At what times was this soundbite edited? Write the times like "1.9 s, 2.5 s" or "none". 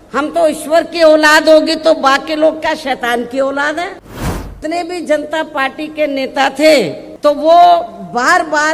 4.6 s, 7.0 s

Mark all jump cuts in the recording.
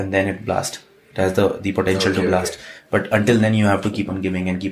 none

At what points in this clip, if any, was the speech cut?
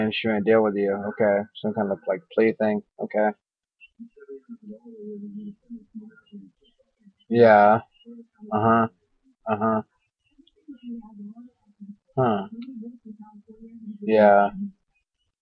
1.9 s

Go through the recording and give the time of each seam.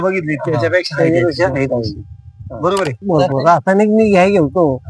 3.0 s

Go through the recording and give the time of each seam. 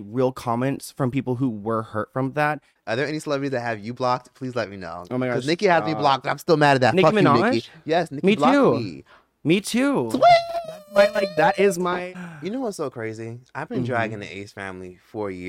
2.7 s, 11.9 s

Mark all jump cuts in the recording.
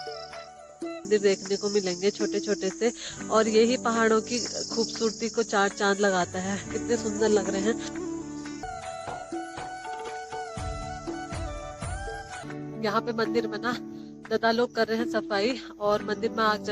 1.1 s, 8.6 s, 12.4 s

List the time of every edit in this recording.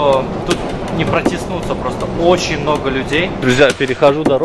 3.4 s

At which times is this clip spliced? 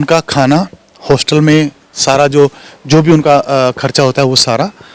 none

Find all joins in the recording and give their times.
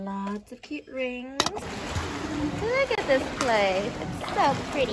1.6 s

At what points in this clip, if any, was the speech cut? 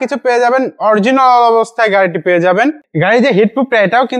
2.8 s

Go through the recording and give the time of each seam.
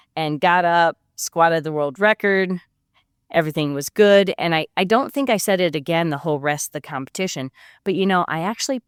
none

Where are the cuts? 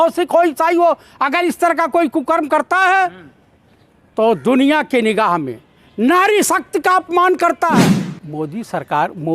7.8 s

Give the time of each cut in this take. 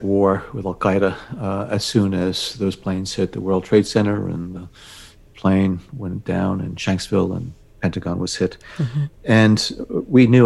none

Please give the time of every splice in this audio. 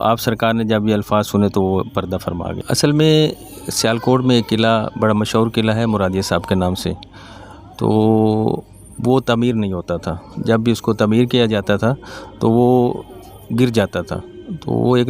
2.5 s

